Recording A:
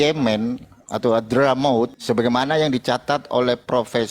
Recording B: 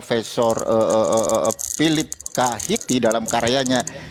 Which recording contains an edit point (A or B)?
A